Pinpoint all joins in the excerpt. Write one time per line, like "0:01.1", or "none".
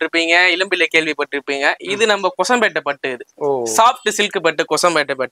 none

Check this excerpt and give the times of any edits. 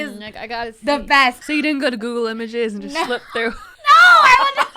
0:01.4
0:03.7

